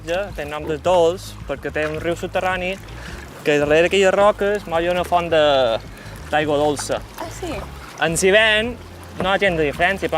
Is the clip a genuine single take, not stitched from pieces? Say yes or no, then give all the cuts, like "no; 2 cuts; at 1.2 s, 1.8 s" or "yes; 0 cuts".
yes; 0 cuts